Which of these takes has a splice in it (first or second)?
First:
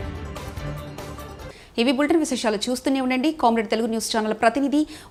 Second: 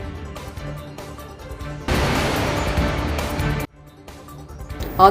second